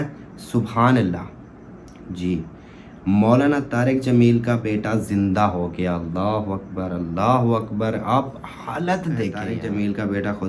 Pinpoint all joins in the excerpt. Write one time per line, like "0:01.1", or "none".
0:09.5